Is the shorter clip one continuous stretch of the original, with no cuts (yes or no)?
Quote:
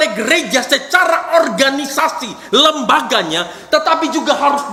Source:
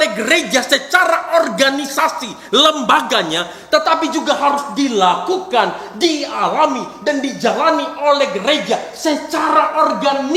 yes